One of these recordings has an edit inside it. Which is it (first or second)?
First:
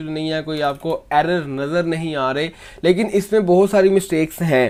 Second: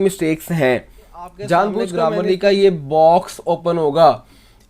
second